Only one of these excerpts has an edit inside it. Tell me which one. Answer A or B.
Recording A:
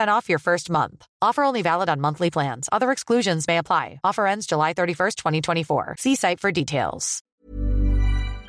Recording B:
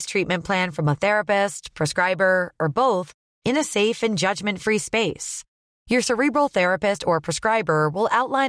A